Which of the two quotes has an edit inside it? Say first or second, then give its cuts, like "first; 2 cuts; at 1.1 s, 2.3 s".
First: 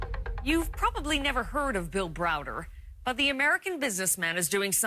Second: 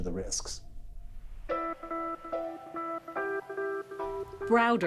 second; 1 cut; at 1.9 s